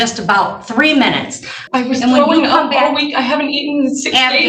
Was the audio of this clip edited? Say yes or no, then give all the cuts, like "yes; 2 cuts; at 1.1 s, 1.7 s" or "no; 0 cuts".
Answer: yes; 1 cut; at 1.5 s